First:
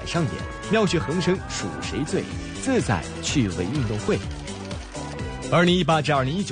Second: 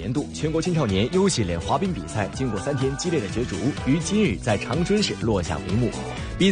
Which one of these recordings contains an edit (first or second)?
first